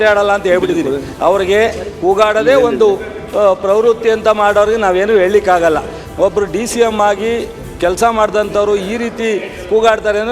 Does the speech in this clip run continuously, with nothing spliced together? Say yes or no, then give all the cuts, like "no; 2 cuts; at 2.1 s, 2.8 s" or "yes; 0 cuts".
yes; 0 cuts